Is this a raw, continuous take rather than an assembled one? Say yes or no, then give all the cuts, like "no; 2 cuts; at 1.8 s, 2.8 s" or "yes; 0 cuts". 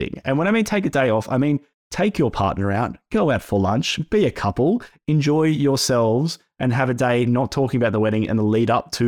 yes; 0 cuts